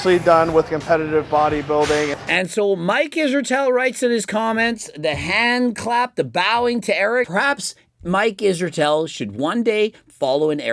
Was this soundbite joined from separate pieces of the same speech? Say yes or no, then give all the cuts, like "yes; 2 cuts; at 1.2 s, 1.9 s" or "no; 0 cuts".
yes; 2 cuts; at 2.2 s, 7.3 s